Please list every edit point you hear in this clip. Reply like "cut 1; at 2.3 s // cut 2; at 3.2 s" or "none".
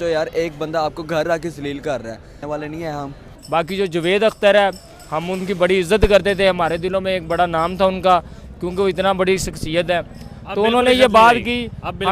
none